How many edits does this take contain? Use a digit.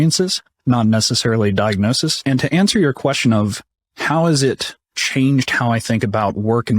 1